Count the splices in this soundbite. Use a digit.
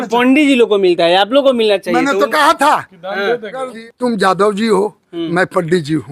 1